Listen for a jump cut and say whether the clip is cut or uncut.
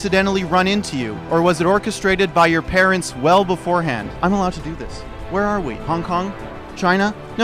cut